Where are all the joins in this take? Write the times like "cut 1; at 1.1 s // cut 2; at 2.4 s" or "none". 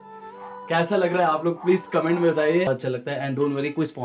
cut 1; at 2.7 s